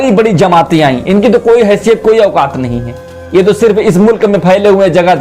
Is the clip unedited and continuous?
yes; 0 cuts

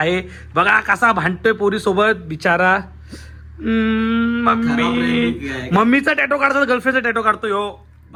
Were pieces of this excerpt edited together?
no; 0 cuts

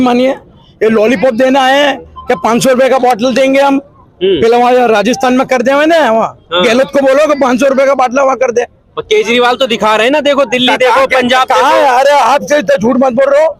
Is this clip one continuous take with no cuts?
yes; 0 cuts

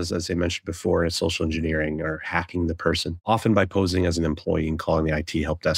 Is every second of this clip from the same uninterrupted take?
no; 1 cut; at 3.2 s

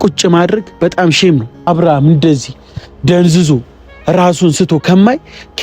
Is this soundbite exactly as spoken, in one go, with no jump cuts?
no; 1 cut; at 1.7 s

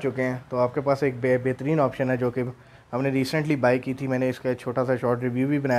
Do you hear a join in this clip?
no; 0 cuts

